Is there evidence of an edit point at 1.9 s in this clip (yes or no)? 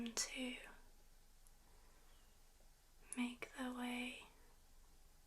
no